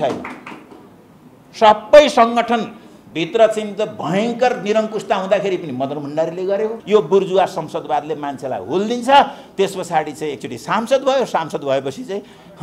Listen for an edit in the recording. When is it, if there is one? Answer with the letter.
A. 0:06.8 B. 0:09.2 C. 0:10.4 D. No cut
A